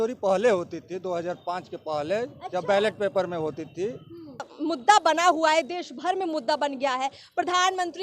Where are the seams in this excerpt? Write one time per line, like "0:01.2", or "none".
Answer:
0:04.5